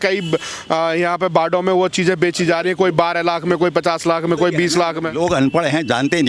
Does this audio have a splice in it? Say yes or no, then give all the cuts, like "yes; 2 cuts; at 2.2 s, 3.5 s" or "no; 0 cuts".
no; 0 cuts